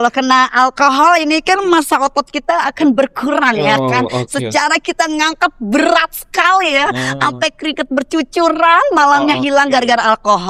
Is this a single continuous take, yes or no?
yes